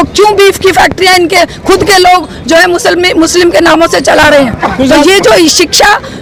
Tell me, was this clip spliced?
no; 0 cuts

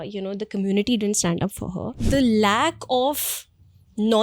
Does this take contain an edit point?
yes; 1 cut; at 2.0 s

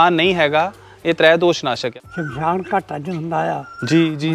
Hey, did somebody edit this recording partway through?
yes; 1 cut; at 1.9 s

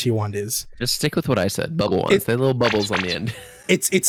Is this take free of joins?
yes; 0 cuts

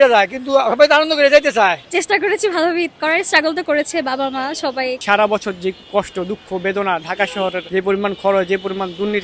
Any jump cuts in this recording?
yes; 3 cuts; at 1.9 s, 5.0 s, 7.6 s

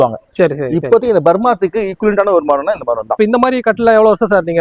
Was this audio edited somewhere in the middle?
yes; 1 cut; at 3.2 s

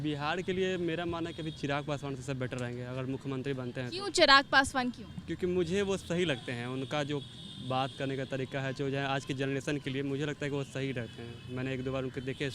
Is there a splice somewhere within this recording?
no; 0 cuts

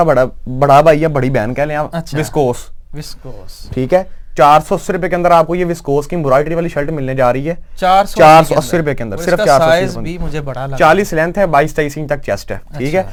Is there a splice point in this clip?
no; 0 cuts

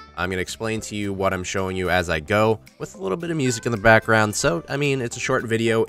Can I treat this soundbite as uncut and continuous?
no; 1 cut; at 3.7 s

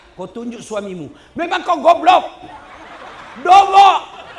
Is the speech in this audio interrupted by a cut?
no; 0 cuts

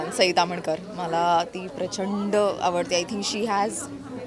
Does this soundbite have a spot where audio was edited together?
no; 0 cuts

